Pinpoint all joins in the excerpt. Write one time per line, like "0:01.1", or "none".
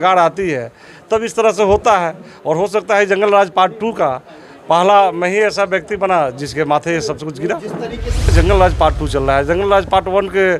0:08.3